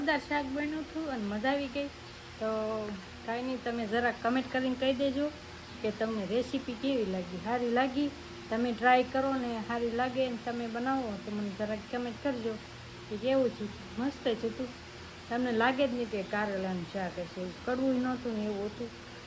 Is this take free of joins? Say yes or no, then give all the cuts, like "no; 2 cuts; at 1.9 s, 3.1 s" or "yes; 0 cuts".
yes; 0 cuts